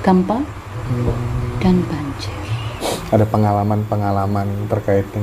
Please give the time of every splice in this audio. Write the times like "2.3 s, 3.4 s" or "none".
2.7 s